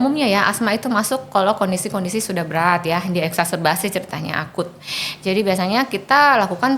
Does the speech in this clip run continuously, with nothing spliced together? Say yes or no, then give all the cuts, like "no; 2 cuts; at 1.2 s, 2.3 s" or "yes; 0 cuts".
yes; 0 cuts